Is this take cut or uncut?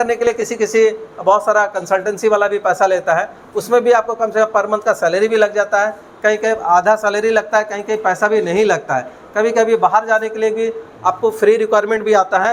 uncut